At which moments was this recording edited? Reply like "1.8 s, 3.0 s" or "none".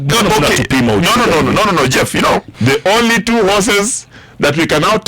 2.5 s

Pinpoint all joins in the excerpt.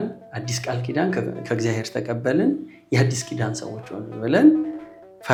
none

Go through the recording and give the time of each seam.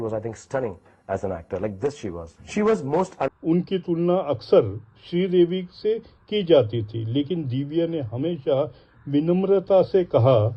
3.3 s

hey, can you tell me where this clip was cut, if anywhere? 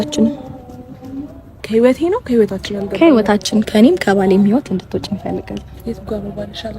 1.6 s

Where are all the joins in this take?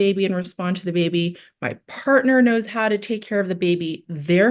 none

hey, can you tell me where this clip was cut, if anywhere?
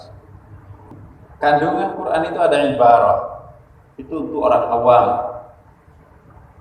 1.1 s

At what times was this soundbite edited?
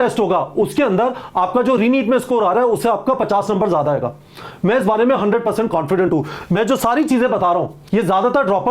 none

